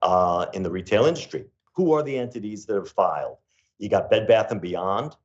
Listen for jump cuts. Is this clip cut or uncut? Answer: cut